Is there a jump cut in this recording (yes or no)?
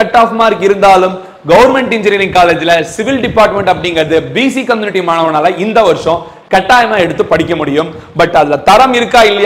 no